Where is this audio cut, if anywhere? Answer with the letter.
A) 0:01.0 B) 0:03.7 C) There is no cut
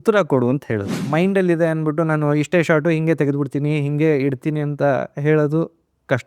A